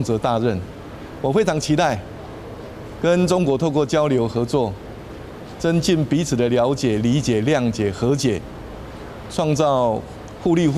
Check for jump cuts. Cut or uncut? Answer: uncut